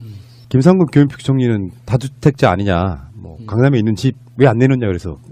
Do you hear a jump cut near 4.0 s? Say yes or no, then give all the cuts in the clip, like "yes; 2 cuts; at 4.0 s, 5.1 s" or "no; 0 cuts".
yes; 1 cut; at 4.0 s